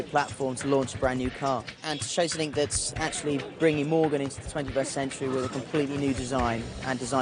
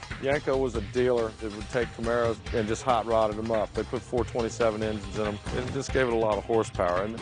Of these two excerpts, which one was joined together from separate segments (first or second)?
second